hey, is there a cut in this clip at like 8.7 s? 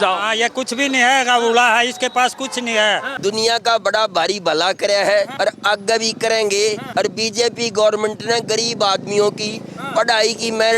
no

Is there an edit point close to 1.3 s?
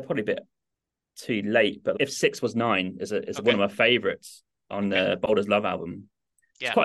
no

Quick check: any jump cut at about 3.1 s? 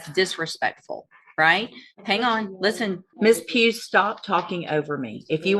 yes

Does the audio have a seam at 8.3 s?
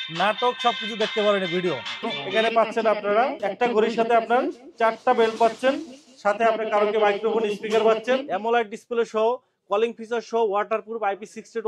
yes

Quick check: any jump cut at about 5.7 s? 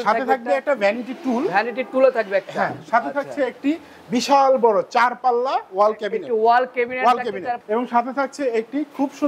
no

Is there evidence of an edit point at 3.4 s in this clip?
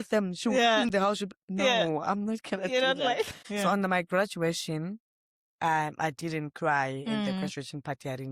yes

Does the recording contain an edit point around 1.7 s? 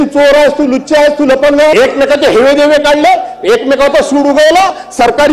yes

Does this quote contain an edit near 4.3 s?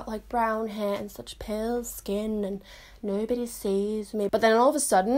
yes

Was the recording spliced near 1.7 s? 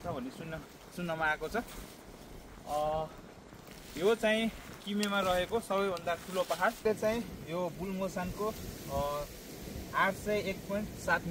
no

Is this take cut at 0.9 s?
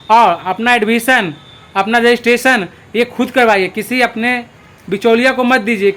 no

